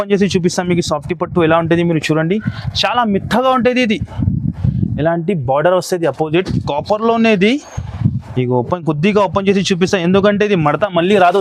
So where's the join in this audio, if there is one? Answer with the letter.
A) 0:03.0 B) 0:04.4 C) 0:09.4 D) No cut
D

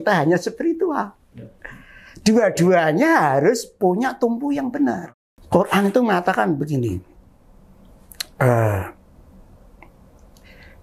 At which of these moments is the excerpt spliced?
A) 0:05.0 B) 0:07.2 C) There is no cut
A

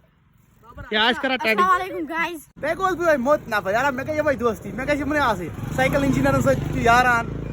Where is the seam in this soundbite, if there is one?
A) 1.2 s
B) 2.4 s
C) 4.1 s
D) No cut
B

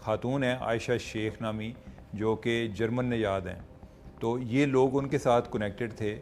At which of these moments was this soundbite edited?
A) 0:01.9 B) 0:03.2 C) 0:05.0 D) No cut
D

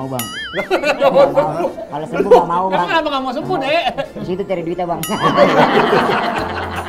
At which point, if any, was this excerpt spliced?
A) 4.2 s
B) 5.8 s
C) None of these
A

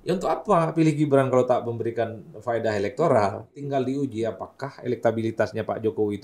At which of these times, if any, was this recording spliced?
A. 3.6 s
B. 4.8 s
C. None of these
A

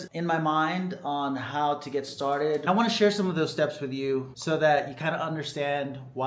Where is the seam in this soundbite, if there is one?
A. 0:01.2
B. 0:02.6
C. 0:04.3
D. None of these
B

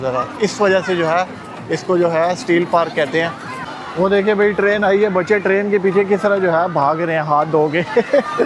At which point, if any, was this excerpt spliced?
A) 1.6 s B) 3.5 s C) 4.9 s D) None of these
B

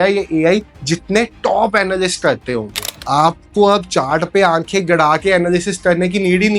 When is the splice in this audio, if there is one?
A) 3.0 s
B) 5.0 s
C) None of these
A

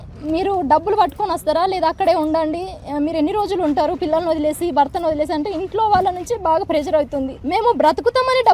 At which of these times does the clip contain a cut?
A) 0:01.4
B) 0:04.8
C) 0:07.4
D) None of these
C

